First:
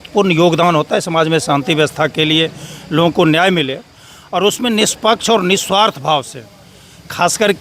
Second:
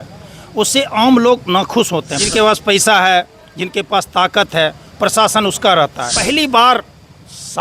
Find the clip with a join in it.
second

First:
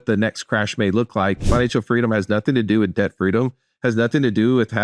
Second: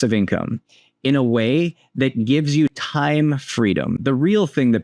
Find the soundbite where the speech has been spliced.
first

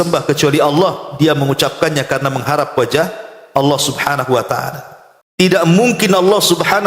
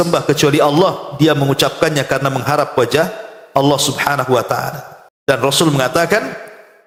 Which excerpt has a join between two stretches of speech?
first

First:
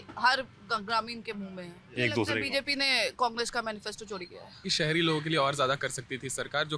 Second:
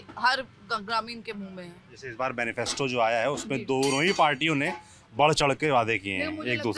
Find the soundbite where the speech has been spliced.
first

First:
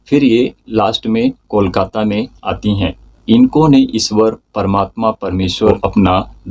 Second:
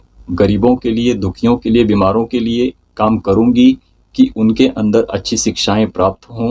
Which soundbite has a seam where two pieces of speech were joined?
first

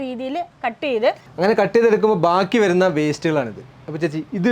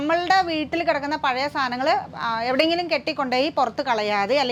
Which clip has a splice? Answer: first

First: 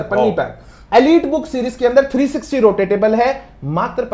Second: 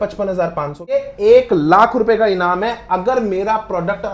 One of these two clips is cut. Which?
second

